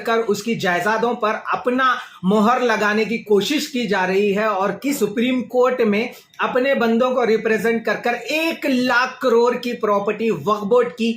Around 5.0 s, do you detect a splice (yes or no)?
yes